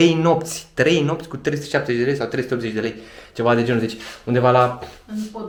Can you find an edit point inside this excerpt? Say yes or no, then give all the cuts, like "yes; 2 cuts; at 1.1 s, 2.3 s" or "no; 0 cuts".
no; 0 cuts